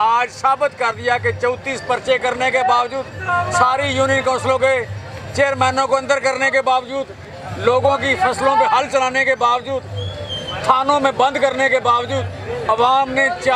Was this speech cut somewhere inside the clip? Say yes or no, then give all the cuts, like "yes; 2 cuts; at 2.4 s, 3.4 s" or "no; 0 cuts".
no; 0 cuts